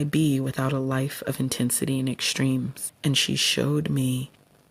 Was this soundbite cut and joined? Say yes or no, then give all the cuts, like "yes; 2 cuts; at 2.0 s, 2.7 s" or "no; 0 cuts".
yes; 1 cut; at 2.8 s